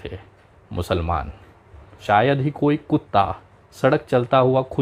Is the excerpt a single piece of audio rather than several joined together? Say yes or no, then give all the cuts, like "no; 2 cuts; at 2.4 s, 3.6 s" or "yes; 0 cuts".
no; 1 cut; at 2.0 s